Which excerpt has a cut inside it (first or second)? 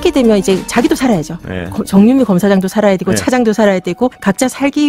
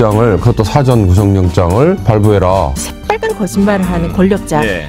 second